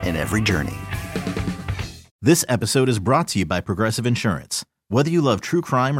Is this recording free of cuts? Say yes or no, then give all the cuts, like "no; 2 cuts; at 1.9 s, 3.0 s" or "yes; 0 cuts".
no; 1 cut; at 2.1 s